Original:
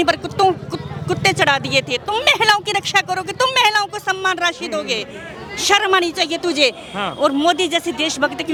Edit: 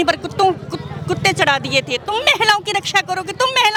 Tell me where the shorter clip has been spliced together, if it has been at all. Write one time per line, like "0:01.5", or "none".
none

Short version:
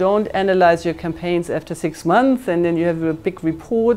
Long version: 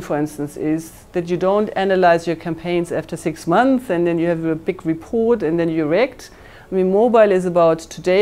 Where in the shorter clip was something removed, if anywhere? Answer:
none

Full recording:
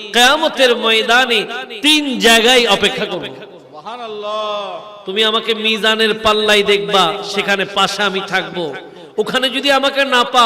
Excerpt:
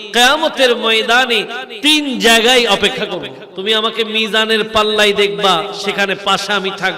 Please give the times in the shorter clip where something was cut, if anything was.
0:03.4

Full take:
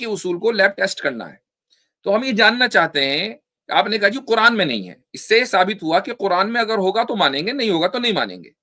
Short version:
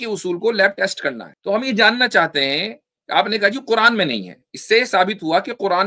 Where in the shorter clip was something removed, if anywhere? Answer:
0:01.3

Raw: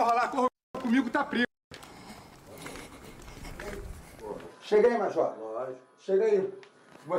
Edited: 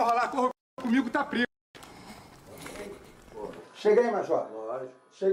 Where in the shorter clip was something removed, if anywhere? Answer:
0:02.8

